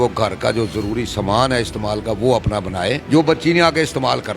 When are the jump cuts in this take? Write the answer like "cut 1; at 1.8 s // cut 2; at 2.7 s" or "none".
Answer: cut 1; at 3.0 s